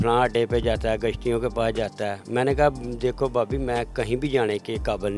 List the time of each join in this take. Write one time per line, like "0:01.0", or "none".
none